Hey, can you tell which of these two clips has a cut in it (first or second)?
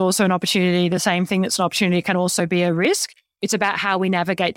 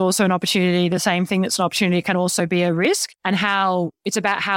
first